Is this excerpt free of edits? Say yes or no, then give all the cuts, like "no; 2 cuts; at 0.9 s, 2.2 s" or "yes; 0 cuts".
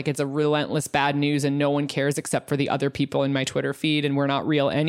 yes; 0 cuts